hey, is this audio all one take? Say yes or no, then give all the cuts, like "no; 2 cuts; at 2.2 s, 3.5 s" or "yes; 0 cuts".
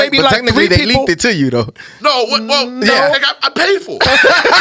yes; 0 cuts